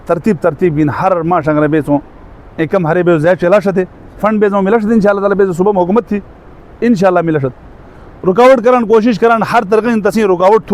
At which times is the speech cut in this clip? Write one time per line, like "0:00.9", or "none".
none